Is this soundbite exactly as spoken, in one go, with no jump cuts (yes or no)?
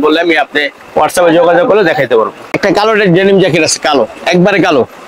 no